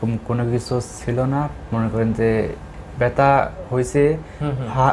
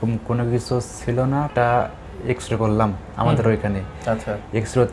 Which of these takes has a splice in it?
second; 1 cut; at 1.5 s

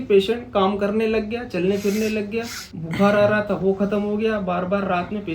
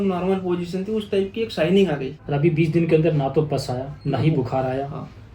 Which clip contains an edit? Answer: second; 2 cuts; at 2.1 s, 3.9 s

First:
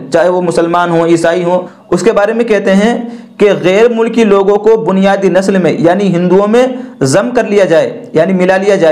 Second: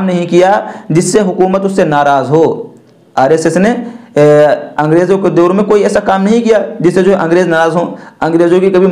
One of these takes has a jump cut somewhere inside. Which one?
first; 1 cut; at 1.7 s

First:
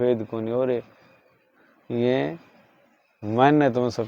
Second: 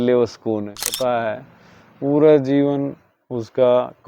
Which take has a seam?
second; 1 cut; at 0.9 s

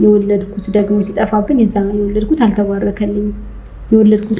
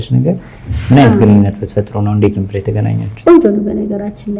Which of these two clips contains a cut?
second; 1 cut; at 3.2 s

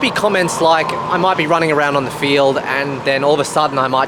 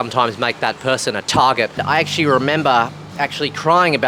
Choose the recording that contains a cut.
second; 1 cut; at 1.8 s

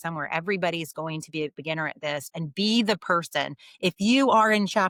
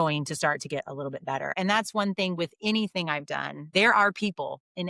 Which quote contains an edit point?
second; 2 cuts; at 1.5 s, 3.6 s

